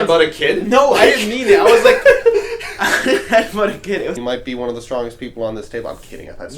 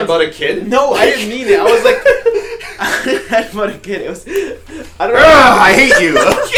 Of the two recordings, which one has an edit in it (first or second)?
first